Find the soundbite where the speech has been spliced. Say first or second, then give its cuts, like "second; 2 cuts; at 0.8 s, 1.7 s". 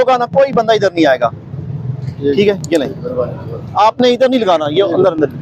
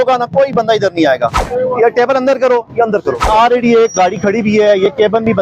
second; 2 cuts; at 1.4 s, 3.3 s